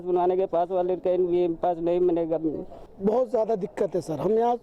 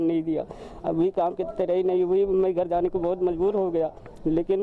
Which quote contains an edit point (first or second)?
first